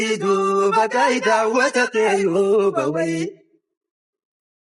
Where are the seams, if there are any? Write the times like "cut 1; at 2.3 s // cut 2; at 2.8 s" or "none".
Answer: cut 1; at 1.8 s